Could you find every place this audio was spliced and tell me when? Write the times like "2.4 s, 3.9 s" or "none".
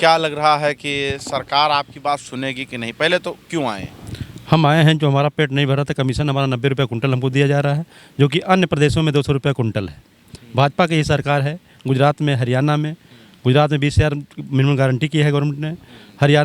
none